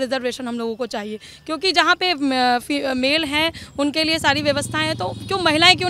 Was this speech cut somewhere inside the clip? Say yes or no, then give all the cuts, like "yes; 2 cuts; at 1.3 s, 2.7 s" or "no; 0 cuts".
no; 0 cuts